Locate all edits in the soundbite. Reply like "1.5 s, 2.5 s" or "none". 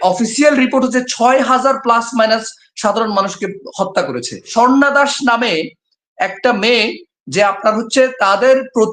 4.4 s